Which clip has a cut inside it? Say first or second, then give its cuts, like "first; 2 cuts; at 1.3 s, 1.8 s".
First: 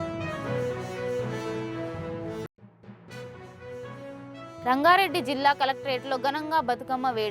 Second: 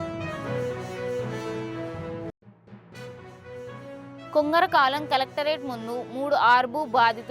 second; 1 cut; at 2.2 s